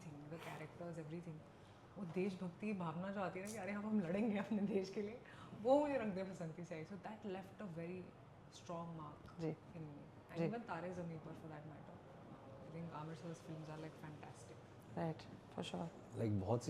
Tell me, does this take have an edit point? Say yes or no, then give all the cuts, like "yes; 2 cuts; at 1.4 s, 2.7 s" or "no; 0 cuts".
no; 0 cuts